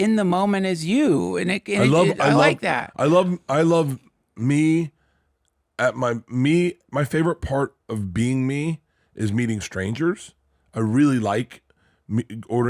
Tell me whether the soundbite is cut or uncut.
uncut